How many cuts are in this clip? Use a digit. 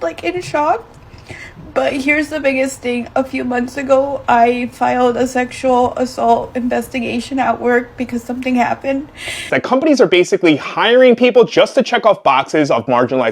1